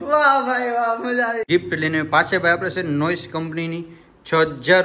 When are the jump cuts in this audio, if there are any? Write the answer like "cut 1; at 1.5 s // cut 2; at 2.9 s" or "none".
cut 1; at 1.5 s

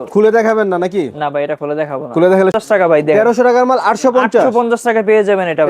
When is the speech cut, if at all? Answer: cut 1; at 2.5 s

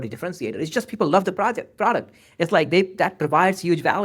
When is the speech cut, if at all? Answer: none

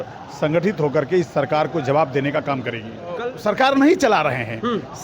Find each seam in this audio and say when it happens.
cut 1; at 3.3 s

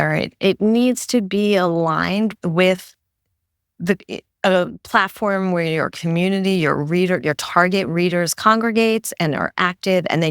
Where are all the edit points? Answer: none

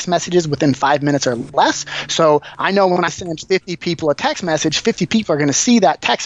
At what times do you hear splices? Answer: cut 1; at 1.4 s

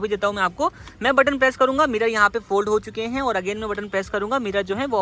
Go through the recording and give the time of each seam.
none

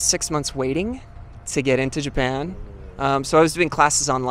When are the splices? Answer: none

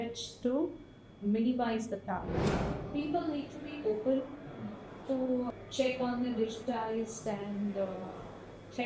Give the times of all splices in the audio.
cut 1; at 2.3 s // cut 2; at 5.5 s

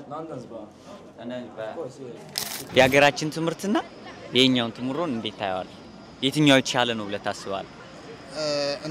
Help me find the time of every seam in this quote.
none

